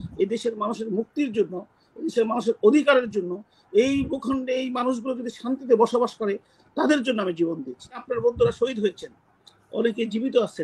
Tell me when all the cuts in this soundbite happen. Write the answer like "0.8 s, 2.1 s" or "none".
8.1 s